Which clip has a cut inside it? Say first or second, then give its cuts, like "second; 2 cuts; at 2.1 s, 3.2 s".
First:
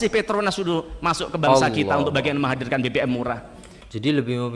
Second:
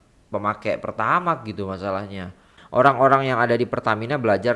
second; 1 cut; at 2.5 s